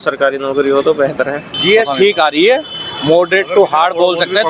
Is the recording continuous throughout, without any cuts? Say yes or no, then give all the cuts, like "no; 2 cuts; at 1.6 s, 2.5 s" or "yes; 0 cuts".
no; 1 cut; at 1.5 s